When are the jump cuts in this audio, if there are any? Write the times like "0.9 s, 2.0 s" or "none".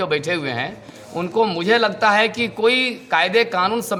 none